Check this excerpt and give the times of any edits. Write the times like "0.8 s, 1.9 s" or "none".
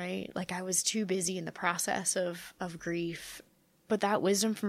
3.3 s